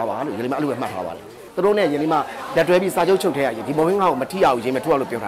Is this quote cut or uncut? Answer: cut